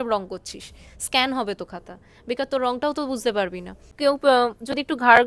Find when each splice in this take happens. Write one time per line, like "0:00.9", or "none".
0:03.9